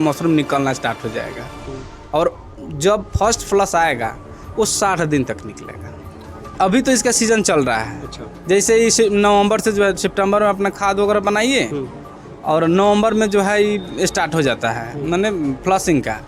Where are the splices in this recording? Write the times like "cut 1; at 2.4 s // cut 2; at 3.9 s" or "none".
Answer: cut 1; at 6.4 s